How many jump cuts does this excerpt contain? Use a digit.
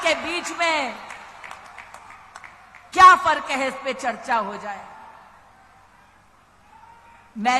0